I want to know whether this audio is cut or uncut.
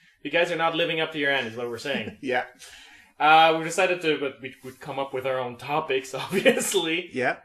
cut